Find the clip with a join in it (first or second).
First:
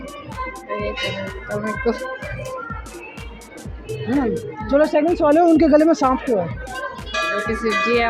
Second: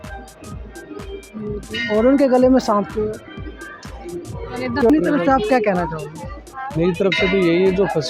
second